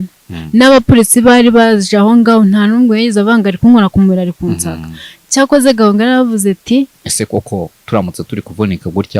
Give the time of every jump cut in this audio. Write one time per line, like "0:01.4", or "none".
0:07.0